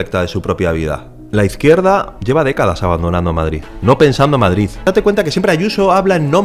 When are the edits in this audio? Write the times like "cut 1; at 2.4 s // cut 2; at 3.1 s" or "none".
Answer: cut 1; at 1.1 s // cut 2; at 2.1 s // cut 3; at 3.7 s // cut 4; at 4.8 s